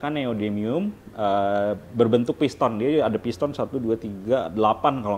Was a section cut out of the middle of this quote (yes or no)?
no